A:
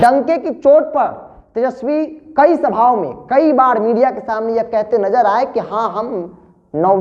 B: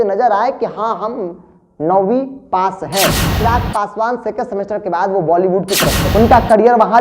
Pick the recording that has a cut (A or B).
B